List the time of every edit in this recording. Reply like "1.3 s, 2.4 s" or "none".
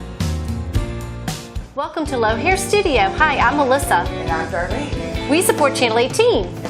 1.6 s